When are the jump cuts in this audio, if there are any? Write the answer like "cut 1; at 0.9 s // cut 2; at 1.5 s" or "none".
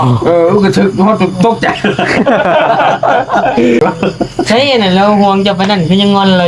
cut 1; at 3.8 s